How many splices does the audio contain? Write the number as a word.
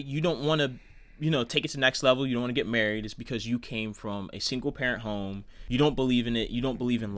one